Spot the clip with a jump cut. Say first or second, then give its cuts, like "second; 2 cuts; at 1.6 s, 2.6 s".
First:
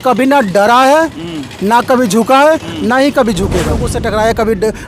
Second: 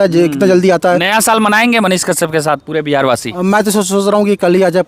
first; 1 cut; at 3.9 s